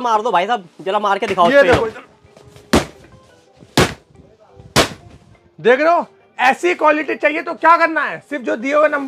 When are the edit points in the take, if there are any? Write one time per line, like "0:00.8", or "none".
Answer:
none